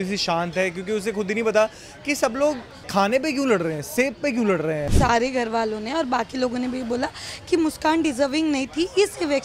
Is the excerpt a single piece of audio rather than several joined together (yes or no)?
no